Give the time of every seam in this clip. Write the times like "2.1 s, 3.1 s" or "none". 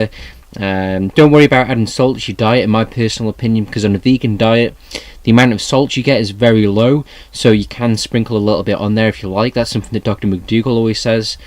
1.2 s